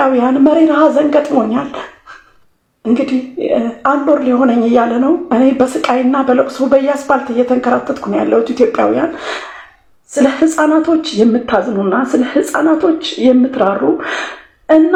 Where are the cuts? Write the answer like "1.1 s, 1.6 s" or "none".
none